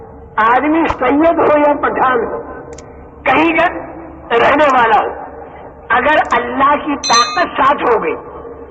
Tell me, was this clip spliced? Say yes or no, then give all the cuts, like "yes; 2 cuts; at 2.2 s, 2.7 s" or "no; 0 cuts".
yes; 1 cut; at 0.9 s